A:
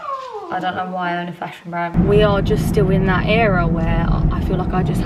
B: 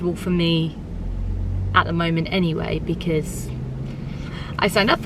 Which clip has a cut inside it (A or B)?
A